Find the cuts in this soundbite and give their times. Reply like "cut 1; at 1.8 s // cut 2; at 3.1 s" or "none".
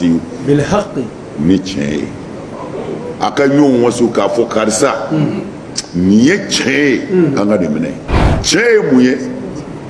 cut 1; at 8.1 s